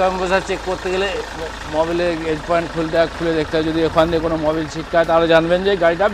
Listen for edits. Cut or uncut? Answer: uncut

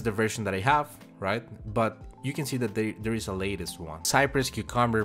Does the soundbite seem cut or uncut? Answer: cut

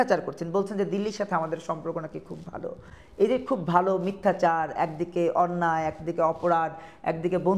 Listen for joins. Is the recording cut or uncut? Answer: uncut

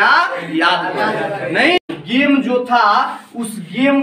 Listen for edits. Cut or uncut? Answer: cut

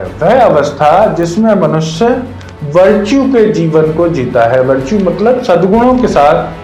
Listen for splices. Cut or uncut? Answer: uncut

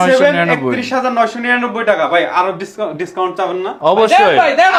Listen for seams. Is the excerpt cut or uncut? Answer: uncut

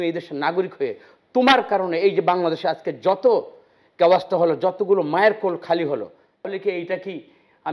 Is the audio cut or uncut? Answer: cut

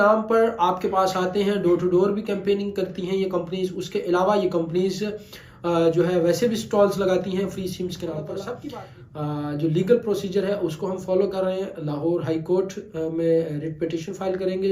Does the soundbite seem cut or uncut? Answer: cut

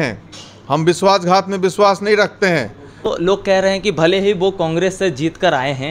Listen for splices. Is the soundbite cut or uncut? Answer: cut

